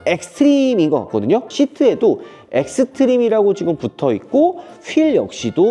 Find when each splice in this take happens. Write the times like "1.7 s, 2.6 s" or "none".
1.5 s